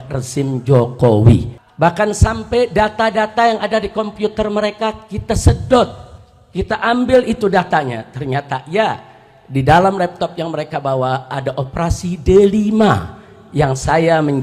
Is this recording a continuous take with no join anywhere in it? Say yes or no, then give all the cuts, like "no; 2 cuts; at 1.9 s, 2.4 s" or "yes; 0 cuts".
no; 1 cut; at 1.6 s